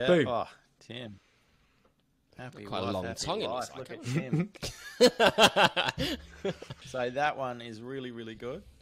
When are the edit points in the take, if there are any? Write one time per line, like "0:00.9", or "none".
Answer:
0:06.7